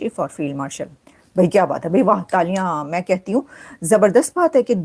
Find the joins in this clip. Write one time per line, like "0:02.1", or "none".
none